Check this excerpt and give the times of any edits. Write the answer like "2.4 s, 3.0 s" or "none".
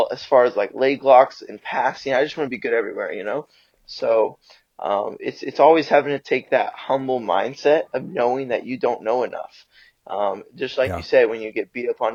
none